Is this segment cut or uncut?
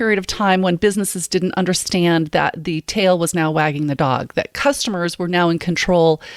uncut